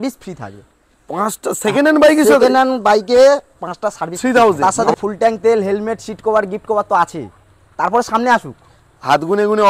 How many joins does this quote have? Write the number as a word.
one